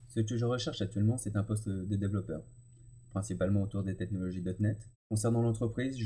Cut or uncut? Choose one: cut